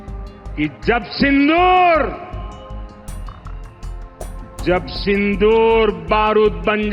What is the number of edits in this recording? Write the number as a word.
two